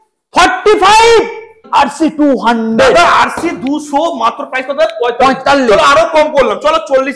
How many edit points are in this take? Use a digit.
1